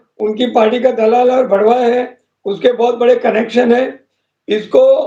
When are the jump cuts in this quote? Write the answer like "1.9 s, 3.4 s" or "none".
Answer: none